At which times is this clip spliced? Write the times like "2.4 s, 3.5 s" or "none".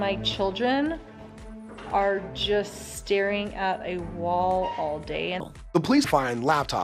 5.4 s